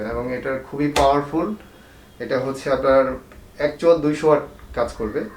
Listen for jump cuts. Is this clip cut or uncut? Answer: uncut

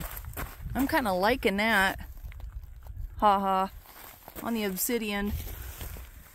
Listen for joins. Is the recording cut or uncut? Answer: uncut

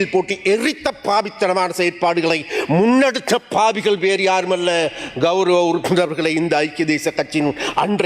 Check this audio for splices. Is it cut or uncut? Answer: uncut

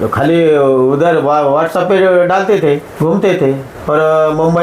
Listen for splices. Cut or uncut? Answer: cut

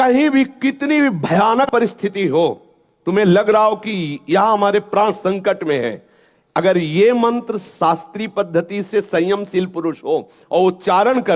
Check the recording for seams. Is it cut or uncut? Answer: cut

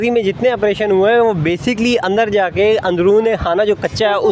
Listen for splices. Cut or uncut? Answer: uncut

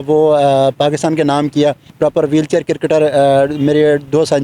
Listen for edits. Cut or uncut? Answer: cut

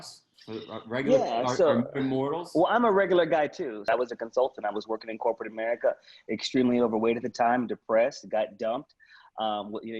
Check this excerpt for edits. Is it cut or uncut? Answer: cut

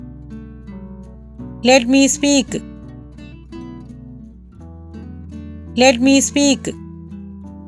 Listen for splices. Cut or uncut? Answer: uncut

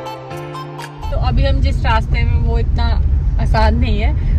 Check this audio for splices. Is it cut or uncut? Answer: cut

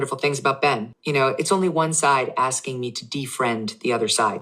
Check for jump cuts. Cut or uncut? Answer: cut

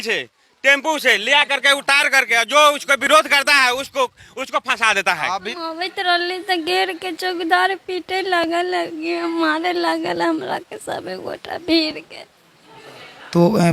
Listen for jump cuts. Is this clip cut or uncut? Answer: cut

